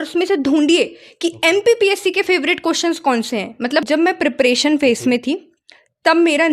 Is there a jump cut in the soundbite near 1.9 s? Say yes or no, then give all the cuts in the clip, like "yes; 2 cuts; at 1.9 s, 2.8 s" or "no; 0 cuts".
no; 1 cut; at 3.8 s